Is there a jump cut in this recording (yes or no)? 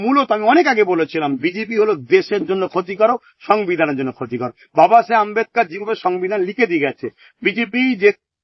no